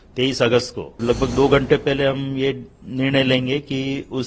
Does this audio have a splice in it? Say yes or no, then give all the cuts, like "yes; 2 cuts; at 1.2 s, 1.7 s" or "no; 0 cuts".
yes; 1 cut; at 1.0 s